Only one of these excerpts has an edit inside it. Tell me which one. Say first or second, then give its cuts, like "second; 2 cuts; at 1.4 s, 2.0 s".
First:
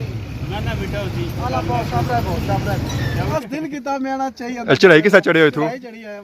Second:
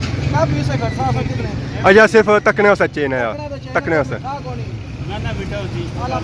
first; 1 cut; at 3.3 s